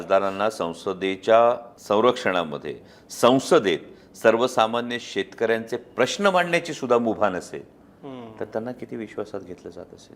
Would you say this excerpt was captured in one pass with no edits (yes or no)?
no